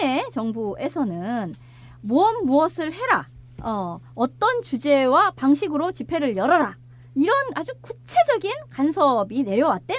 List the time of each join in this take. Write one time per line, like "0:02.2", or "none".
0:02.9